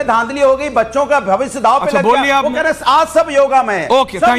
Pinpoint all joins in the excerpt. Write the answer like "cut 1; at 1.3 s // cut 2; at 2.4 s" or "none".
none